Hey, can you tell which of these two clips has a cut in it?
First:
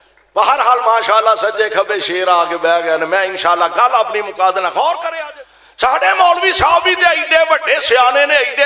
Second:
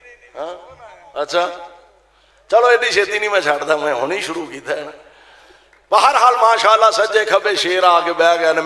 first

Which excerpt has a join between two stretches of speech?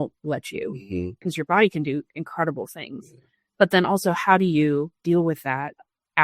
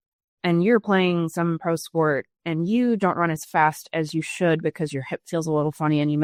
first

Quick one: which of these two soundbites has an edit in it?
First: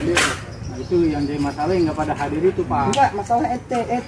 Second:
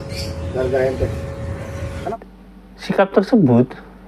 second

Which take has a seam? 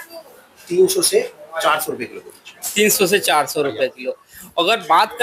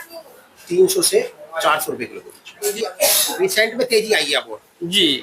second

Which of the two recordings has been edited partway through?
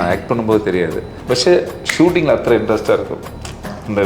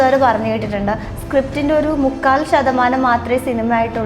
first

